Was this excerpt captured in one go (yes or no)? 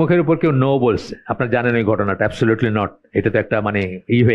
yes